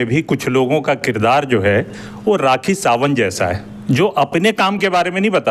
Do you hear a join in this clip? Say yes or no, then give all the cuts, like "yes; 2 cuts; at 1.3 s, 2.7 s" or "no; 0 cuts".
no; 0 cuts